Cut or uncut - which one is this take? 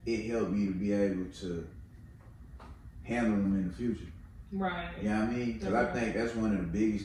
uncut